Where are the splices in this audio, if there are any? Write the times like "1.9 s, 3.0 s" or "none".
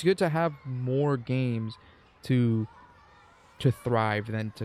none